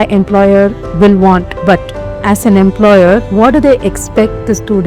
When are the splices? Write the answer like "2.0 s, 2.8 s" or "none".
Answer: 1.5 s, 3.3 s